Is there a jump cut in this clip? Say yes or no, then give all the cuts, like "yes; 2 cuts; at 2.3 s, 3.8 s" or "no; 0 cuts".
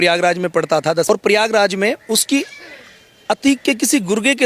yes; 1 cut; at 1.1 s